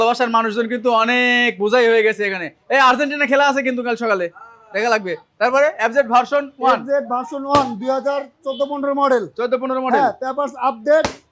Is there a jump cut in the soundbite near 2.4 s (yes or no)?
no